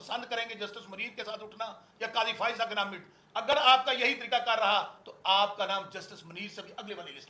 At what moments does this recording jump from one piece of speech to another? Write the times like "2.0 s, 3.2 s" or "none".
none